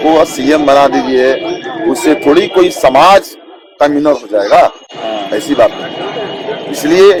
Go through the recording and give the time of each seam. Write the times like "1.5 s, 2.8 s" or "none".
none

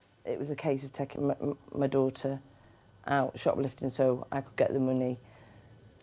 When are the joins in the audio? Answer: 1.1 s

